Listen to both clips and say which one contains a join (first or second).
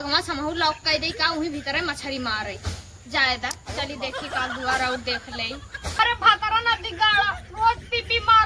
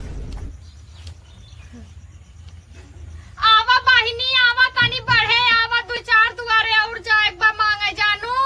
first